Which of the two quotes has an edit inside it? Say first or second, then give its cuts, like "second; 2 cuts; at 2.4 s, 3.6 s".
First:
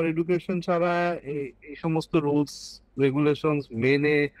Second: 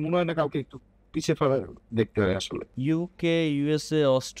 second; 1 cut; at 2.7 s